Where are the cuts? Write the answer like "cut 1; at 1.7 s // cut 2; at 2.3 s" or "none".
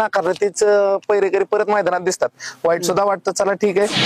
none